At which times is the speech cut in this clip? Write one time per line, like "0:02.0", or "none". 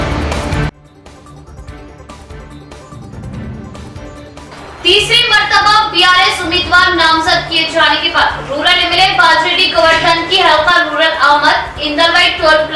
0:02.4